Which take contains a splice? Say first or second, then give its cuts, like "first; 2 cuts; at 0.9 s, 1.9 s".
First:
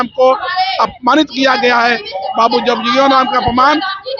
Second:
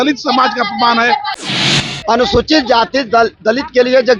second; 1 cut; at 1.4 s